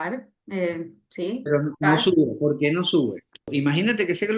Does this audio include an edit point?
yes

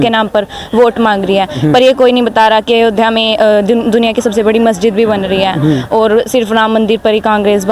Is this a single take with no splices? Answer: yes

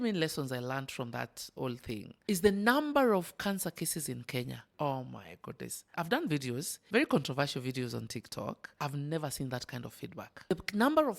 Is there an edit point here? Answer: yes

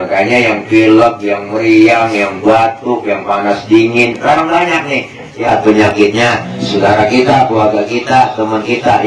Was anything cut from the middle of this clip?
yes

